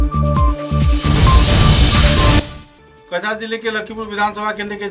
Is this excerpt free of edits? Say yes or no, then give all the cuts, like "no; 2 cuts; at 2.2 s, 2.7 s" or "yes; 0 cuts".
yes; 0 cuts